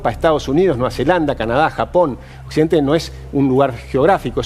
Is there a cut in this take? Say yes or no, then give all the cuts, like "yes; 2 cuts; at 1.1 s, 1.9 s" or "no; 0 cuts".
no; 0 cuts